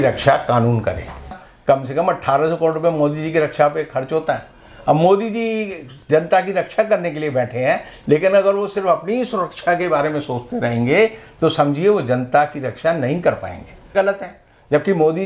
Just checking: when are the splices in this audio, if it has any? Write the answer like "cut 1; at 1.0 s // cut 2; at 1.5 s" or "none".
cut 1; at 1.4 s // cut 2; at 13.9 s